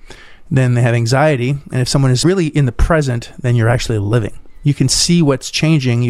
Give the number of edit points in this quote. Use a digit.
2